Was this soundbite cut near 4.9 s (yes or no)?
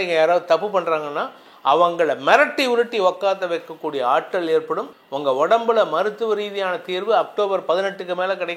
yes